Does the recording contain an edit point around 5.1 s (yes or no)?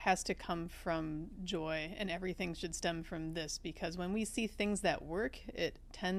no